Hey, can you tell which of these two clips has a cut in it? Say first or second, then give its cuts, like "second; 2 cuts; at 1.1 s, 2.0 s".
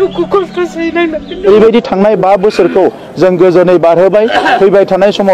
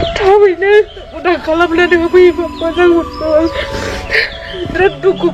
first; 1 cut; at 1.5 s